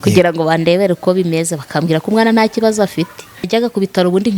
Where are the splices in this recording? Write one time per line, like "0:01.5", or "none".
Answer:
0:03.5